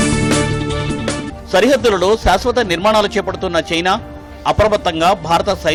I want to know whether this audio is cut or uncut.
uncut